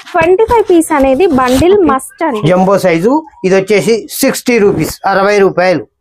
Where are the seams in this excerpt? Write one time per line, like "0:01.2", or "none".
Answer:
0:02.3

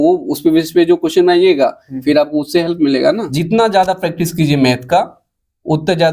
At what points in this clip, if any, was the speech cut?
0:03.3

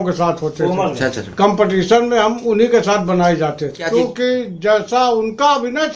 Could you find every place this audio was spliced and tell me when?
0:03.8

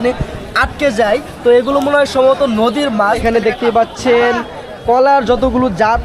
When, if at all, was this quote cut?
0:03.2

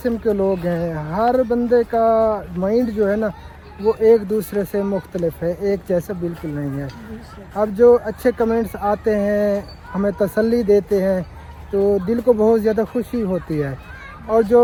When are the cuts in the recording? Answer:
none

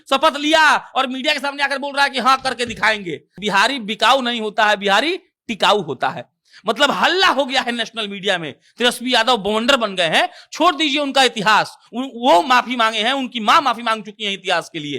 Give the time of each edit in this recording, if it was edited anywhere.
0:03.3

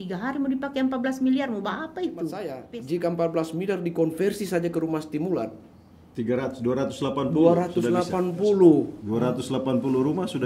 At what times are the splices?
0:02.5

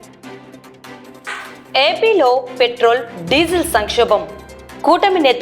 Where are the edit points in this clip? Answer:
0:01.2

